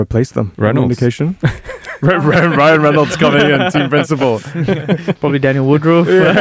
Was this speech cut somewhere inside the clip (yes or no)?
no